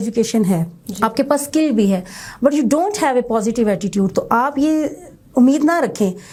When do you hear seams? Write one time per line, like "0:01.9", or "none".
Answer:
none